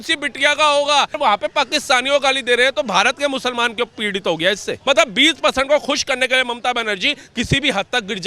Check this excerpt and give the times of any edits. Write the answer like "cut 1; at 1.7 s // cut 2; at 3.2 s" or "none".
cut 1; at 1.2 s // cut 2; at 4.8 s

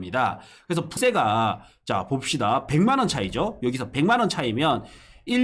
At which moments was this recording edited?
cut 1; at 0.9 s

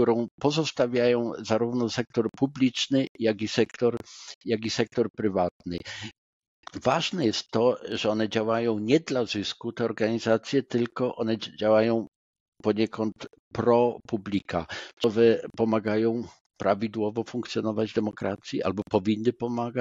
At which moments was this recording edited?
cut 1; at 15.0 s

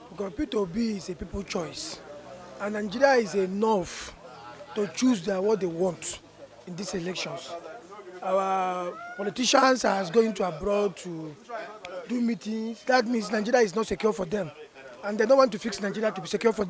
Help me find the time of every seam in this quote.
none

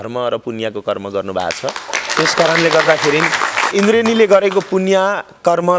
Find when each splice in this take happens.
cut 1; at 3.7 s

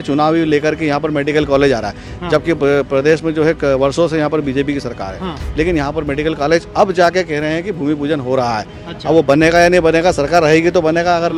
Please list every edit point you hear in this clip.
none

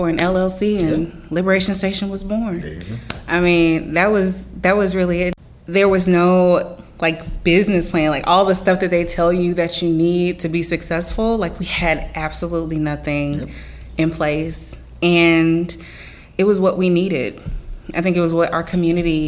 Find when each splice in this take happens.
cut 1; at 5.3 s

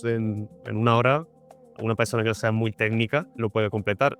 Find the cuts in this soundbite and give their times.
none

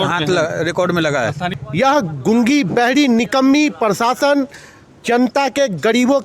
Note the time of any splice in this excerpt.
cut 1; at 1.5 s

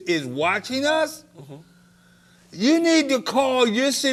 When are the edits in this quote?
none

